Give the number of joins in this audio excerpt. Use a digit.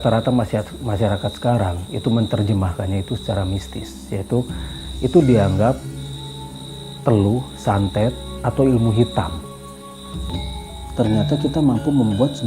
1